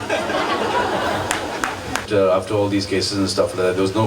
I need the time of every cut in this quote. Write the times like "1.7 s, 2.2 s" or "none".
2.1 s